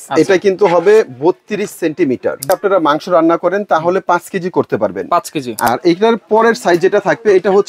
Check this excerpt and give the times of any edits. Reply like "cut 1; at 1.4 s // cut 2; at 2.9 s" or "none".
cut 1; at 2.5 s // cut 2; at 5.7 s

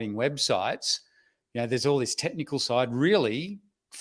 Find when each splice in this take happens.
none

